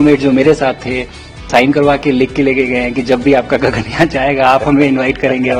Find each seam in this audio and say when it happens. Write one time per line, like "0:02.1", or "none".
0:01.5